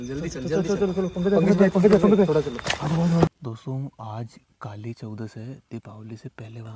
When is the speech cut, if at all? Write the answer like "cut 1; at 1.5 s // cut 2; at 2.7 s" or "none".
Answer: none